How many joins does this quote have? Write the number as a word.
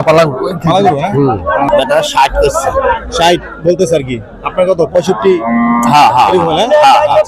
one